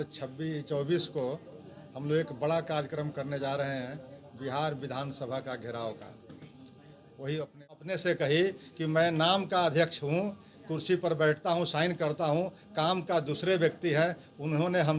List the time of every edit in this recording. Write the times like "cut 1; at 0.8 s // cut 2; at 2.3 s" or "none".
cut 1; at 7.9 s